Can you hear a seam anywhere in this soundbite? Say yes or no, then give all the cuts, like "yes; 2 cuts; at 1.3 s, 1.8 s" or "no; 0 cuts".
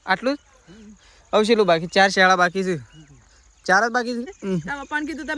yes; 1 cut; at 4.4 s